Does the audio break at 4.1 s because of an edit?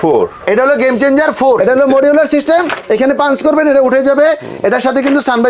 no; 1 cut; at 1.6 s

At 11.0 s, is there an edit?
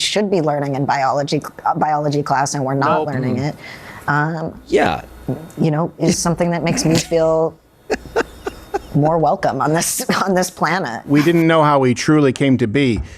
yes; 1 cut; at 11.0 s

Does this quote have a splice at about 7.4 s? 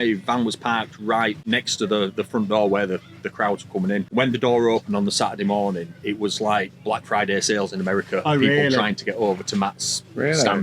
no; 2 cuts; at 1.4 s, 4.1 s

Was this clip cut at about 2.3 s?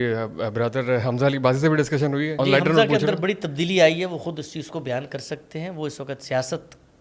yes; 1 cut; at 2.3 s

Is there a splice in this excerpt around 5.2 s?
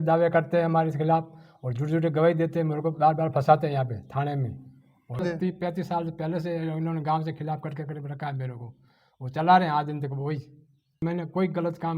yes; 2 cuts; at 5.2 s, 11.0 s

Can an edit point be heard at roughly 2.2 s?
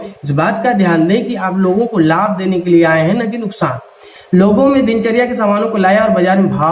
no; 1 cut; at 4.1 s

